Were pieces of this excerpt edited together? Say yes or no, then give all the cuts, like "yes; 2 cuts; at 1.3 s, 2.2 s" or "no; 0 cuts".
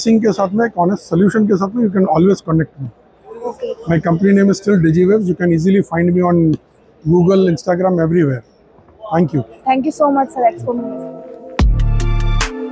no; 0 cuts